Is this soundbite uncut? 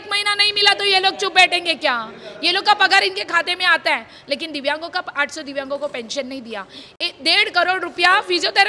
yes; 0 cuts

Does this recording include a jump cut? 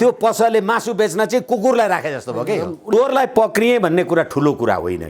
yes; 1 cut; at 2.9 s

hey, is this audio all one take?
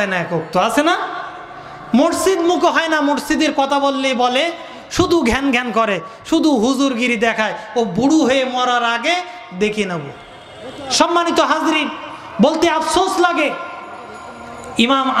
yes; 0 cuts

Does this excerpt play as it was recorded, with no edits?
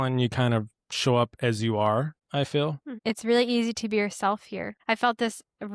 no; 3 cuts; at 2.2 s, 2.9 s, 4.7 s

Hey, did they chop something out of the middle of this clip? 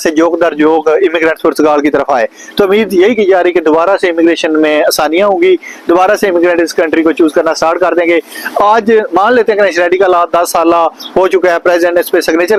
no; 0 cuts

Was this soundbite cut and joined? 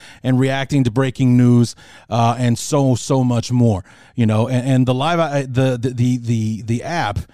no; 0 cuts

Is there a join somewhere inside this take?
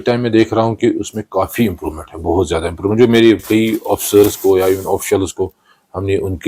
yes; 1 cut; at 3.7 s

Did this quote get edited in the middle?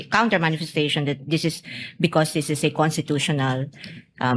no; 0 cuts

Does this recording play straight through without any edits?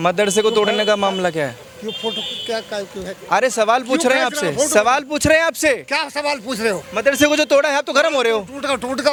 yes; 0 cuts

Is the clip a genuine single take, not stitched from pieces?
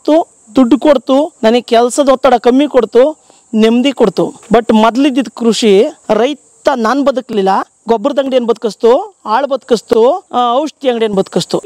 no; 4 cuts; at 1.3 s, 4.4 s, 6.0 s, 10.2 s

